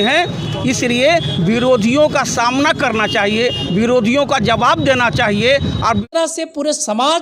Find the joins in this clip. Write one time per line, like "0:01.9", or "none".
0:06.1